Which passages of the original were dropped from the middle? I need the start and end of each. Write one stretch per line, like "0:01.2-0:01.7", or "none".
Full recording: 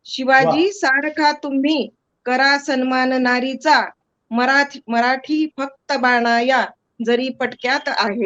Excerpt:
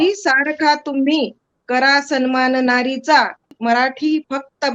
0:04.1-0:04.8